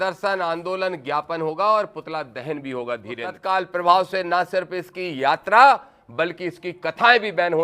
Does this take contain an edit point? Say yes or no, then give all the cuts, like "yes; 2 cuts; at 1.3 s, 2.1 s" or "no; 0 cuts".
yes; 1 cut; at 3.3 s